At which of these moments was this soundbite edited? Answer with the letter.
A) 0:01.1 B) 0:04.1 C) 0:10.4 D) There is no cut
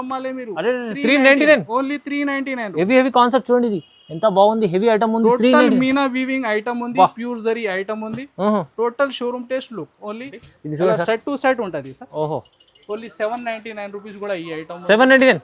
C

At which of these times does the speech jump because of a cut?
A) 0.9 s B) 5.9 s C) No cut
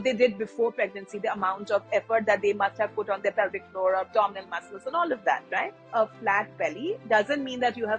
B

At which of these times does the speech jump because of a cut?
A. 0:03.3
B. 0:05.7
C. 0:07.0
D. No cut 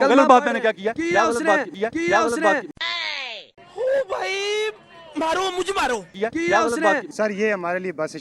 C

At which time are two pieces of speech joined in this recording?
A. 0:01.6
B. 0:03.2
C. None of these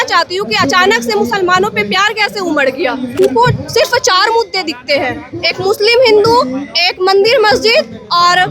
B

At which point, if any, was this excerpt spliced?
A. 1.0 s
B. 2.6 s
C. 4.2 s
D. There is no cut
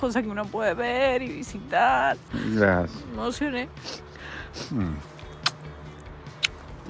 D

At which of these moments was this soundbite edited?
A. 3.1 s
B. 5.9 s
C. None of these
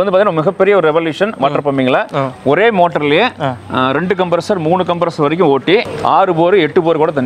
B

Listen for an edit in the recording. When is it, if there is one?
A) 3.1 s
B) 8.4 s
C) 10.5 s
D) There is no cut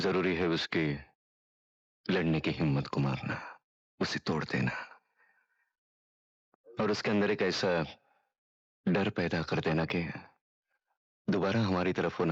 D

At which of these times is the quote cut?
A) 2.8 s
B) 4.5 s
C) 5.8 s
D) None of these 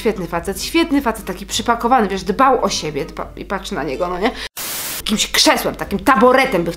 B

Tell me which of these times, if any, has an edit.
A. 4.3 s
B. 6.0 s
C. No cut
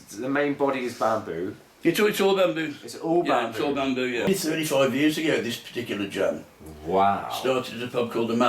A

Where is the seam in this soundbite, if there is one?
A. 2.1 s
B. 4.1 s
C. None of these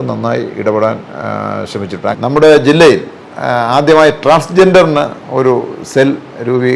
A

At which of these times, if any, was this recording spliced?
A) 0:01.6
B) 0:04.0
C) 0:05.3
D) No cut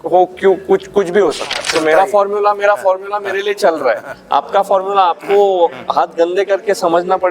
A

